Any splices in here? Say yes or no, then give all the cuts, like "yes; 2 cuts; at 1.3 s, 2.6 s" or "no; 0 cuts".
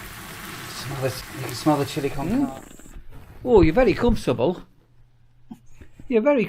yes; 1 cut; at 2.2 s